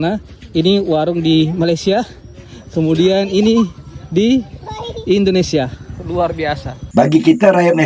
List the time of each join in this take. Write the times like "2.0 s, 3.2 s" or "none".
6.8 s